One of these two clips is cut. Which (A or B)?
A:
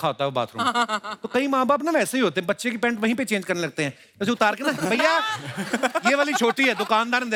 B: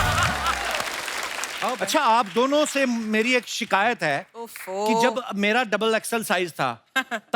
B